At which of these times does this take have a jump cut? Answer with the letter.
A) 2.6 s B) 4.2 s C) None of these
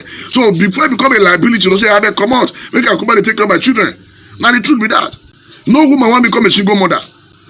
C